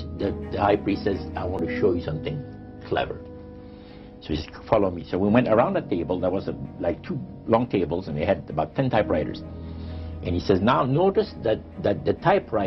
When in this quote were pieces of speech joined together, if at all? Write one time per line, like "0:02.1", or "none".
none